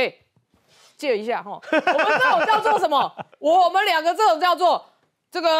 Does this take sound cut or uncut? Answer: uncut